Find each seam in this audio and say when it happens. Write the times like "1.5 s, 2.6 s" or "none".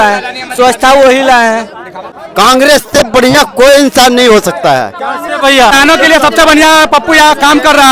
2.1 s, 5.7 s